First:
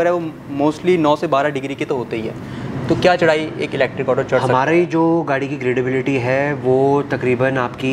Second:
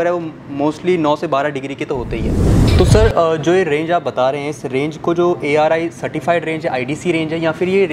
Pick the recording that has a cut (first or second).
second